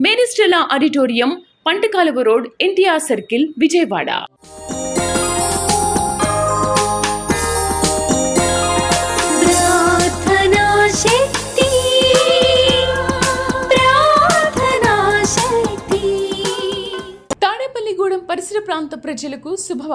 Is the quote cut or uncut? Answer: uncut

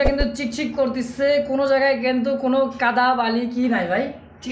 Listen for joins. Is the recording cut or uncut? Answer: uncut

